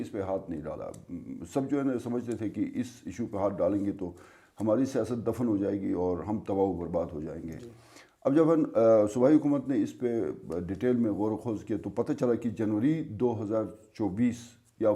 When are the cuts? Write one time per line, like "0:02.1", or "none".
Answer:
none